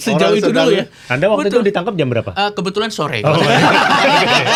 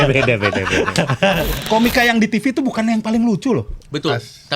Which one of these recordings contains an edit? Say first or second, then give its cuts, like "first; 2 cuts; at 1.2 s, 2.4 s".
second; 1 cut; at 1.5 s